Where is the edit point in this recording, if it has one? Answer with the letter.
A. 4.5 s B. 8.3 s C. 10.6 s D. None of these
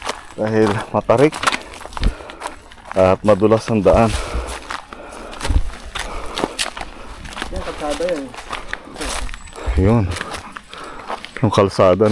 D